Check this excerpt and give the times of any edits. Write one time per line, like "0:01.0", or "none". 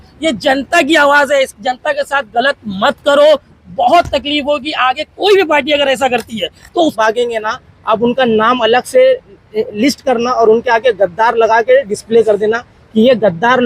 0:06.9